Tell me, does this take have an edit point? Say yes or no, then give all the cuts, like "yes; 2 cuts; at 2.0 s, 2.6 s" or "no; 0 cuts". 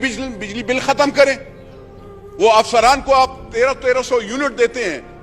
no; 0 cuts